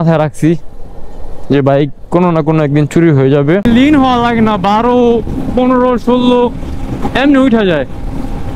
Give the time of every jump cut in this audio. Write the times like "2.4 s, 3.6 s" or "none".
3.6 s